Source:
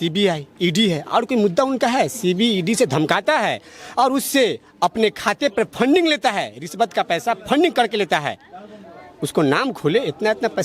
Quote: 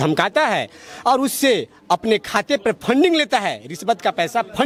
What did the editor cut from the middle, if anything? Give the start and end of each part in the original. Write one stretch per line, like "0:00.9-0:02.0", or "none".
none